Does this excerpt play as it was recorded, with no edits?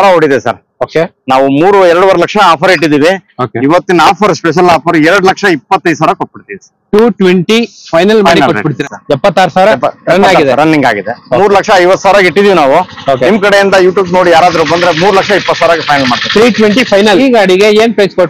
no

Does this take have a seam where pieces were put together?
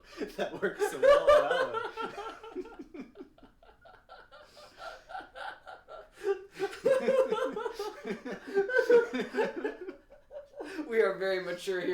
no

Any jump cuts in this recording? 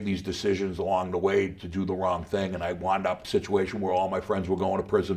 yes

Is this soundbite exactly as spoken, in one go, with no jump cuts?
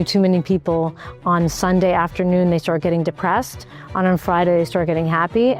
yes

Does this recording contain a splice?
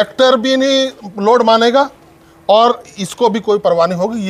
no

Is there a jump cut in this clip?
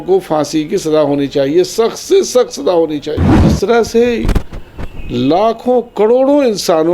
yes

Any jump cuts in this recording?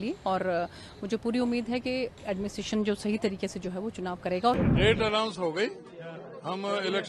yes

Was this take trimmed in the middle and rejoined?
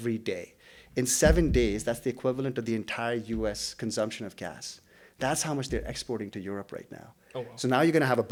no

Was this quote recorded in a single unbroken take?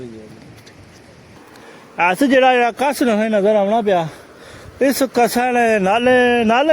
no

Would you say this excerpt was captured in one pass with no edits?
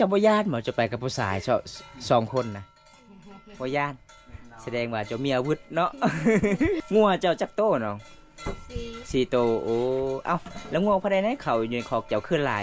no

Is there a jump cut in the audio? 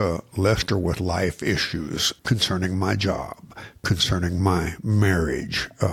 yes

